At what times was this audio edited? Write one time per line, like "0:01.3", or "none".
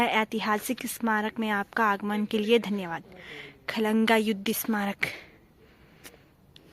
none